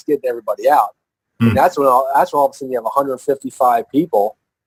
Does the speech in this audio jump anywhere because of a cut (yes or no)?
no